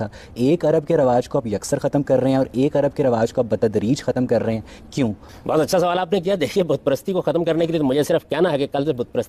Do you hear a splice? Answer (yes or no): yes